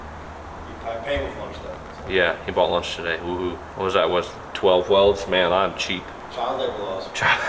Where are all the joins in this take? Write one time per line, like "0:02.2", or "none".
0:03.7
0:06.2